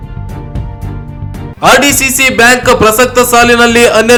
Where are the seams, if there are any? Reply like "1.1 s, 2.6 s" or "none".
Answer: none